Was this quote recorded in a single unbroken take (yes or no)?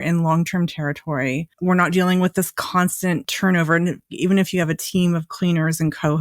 no